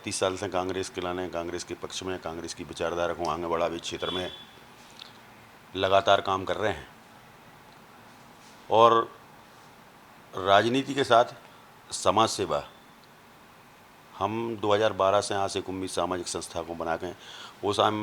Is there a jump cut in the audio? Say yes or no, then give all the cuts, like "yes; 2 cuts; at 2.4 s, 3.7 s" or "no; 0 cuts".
no; 0 cuts